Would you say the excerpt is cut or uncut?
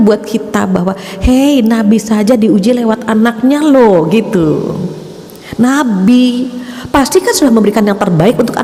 uncut